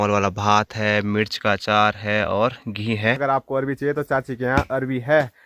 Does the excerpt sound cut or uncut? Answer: cut